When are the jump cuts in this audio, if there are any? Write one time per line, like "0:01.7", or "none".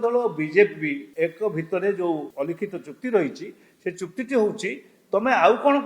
0:01.0
0:02.3